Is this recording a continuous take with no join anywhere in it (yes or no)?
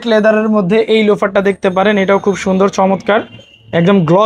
yes